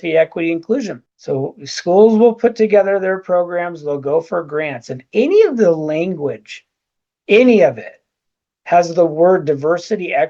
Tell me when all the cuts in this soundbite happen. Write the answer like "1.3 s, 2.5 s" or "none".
1.1 s